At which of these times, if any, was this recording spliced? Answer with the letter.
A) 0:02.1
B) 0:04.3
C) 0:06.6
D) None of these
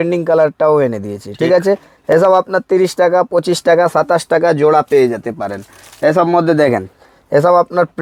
D